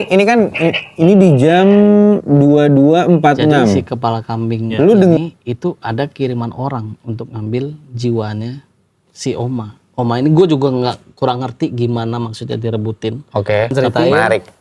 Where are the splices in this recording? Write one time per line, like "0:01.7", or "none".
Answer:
0:05.2
0:13.7